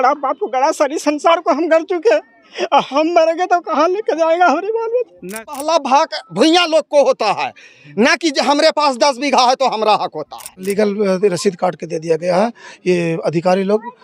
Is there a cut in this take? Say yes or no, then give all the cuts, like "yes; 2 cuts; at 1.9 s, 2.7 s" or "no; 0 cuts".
yes; 2 cuts; at 5.5 s, 10.7 s